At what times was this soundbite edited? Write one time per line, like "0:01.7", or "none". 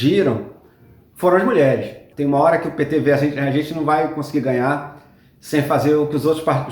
0:02.0